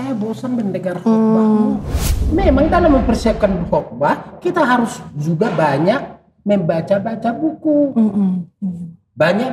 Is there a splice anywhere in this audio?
yes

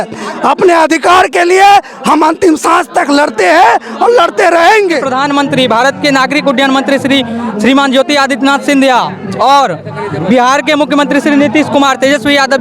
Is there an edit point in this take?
yes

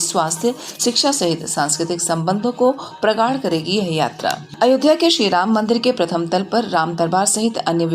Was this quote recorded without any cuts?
no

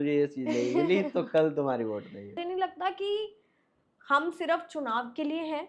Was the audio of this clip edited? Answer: yes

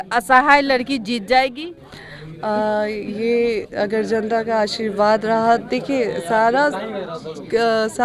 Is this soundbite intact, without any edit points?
yes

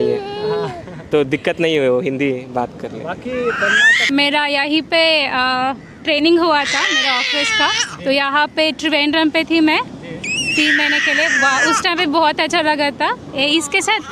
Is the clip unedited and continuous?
yes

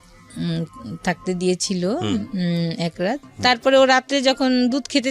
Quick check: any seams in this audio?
yes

